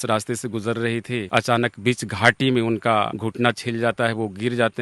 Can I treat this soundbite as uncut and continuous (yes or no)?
no